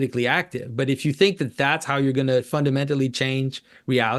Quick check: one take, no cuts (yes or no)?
yes